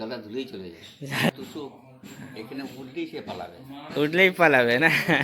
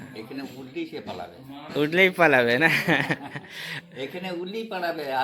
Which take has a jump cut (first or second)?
first